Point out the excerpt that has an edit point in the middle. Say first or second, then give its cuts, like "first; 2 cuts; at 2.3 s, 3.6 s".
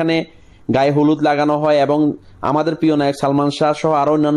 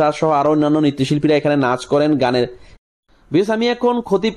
second; 1 cut; at 2.6 s